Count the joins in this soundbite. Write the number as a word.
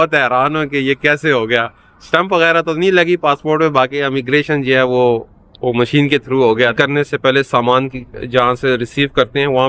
one